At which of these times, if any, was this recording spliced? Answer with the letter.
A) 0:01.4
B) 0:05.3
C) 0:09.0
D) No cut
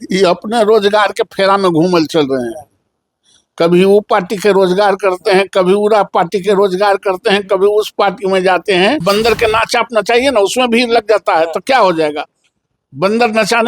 C